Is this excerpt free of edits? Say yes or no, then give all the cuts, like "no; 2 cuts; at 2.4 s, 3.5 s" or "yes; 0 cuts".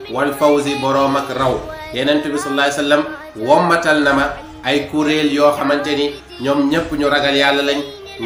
yes; 0 cuts